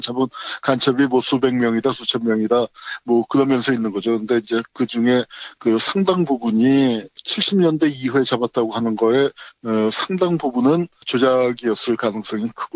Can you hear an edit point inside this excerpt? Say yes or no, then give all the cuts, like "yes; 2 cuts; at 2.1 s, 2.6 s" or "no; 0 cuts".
no; 0 cuts